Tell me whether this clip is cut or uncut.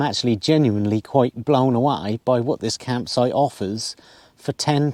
uncut